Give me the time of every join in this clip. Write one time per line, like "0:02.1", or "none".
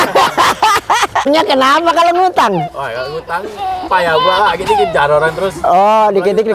0:01.3